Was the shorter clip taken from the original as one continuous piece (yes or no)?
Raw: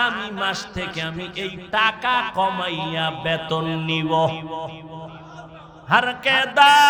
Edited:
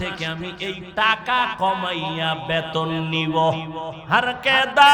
no